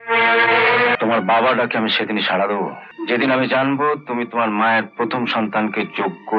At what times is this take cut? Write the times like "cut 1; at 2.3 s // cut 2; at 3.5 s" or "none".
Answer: cut 1; at 0.9 s // cut 2; at 2.9 s